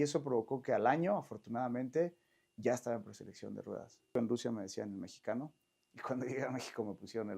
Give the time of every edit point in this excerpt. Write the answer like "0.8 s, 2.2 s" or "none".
4.1 s